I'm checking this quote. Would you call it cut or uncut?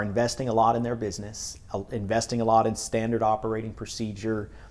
uncut